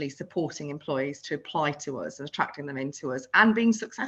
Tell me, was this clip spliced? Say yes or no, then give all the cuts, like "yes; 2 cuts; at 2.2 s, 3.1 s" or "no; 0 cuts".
no; 0 cuts